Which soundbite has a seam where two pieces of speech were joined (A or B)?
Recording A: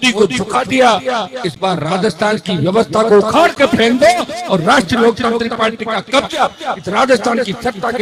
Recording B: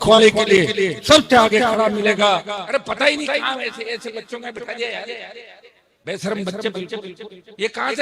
B